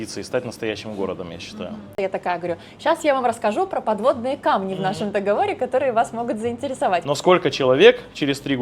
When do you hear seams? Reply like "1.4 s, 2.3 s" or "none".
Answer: 1.9 s, 7.1 s